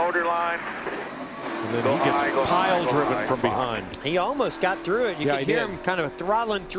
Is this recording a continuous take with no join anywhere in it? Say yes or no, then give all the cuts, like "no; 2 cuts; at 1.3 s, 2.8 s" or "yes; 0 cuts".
yes; 0 cuts